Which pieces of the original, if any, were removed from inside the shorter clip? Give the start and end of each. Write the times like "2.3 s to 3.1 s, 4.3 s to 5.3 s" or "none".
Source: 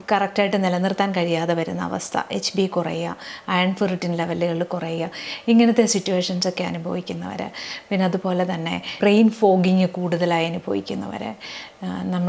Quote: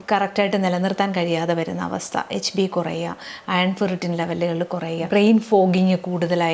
5.0 s to 8.9 s